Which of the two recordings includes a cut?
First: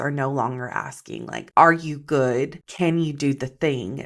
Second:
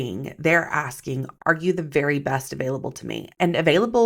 second; 1 cut; at 1.3 s

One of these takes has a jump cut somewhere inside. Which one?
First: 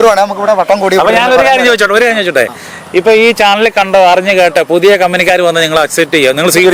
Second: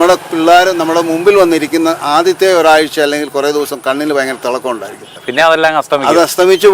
second; 1 cut; at 5.1 s

